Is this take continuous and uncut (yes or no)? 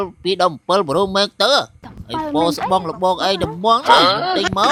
yes